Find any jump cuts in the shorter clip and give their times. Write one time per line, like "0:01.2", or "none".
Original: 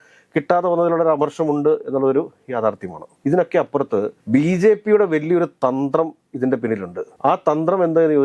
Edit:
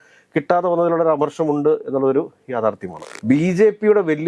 0:03.1